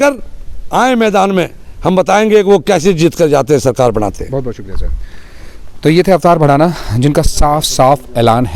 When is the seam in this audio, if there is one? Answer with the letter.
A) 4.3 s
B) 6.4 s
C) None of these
C